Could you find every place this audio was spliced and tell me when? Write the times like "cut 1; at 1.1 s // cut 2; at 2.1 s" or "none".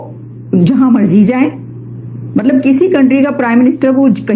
none